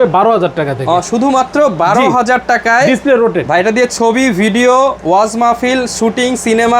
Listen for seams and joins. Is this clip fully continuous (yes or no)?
yes